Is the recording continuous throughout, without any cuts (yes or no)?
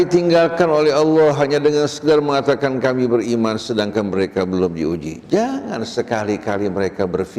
yes